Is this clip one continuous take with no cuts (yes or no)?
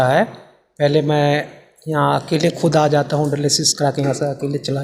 yes